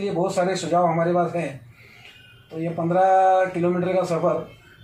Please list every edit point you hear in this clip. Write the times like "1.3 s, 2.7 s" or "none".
none